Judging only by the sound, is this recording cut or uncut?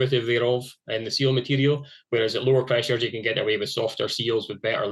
uncut